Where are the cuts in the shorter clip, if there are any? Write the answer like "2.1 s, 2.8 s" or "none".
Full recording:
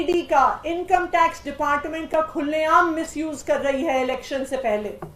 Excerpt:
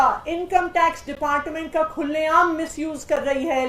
none